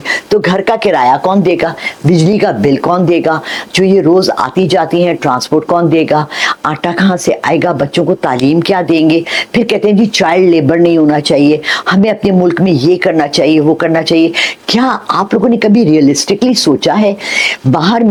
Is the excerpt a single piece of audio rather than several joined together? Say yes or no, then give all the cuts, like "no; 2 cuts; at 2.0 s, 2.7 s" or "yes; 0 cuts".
yes; 0 cuts